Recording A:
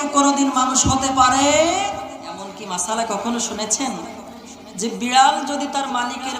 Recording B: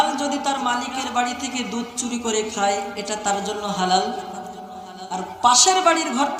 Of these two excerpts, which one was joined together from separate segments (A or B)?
A